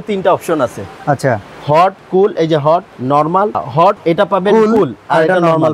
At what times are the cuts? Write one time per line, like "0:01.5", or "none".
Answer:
none